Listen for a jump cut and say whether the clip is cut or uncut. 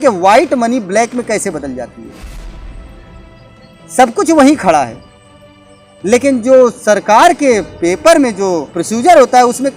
cut